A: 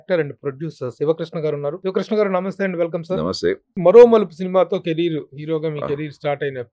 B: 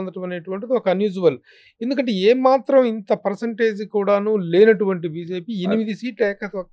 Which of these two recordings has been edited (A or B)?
A